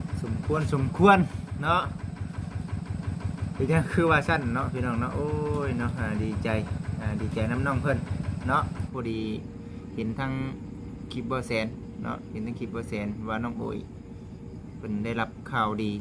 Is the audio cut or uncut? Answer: cut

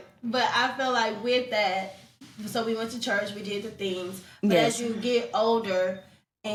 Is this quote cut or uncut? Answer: uncut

